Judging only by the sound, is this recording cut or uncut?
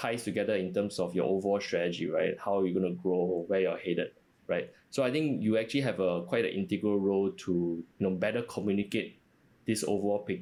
uncut